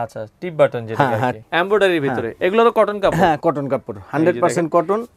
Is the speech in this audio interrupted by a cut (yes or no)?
yes